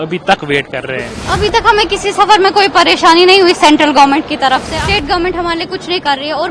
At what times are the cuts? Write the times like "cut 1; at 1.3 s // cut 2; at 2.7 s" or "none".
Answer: cut 1; at 1.1 s // cut 2; at 4.7 s